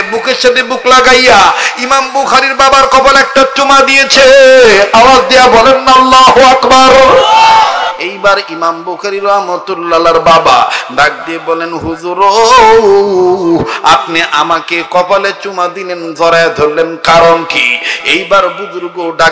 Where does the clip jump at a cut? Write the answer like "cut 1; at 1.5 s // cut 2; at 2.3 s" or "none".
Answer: cut 1; at 7.9 s